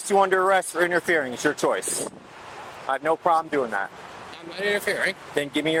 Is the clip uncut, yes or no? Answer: yes